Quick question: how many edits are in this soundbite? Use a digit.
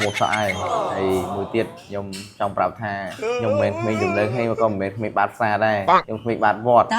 2